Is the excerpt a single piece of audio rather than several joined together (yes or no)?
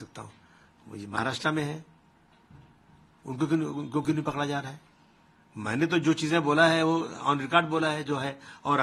yes